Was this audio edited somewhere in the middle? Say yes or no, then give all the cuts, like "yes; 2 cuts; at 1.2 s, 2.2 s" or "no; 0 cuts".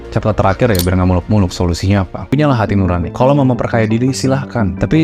yes; 1 cut; at 2.2 s